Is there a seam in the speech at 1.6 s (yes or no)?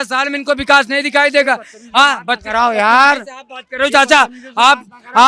no